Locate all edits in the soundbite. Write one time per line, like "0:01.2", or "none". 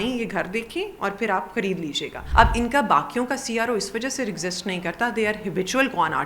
0:02.2